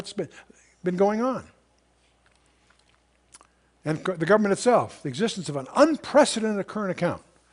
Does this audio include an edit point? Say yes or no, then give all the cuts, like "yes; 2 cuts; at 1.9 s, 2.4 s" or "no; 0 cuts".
no; 0 cuts